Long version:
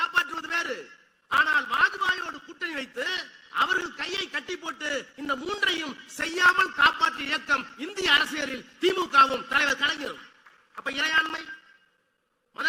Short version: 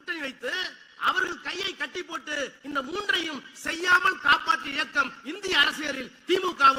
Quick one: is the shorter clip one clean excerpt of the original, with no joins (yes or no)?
yes